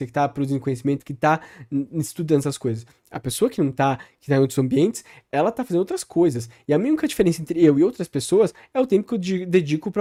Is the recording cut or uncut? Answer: uncut